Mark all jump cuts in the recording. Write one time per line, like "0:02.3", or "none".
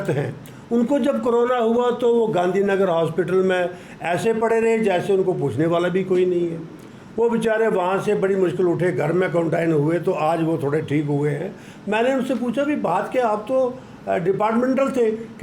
none

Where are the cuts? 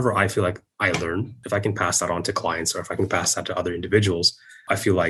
none

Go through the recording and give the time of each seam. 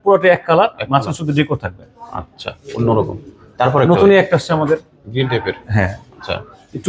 none

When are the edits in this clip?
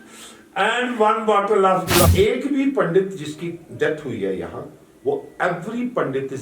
0:02.1

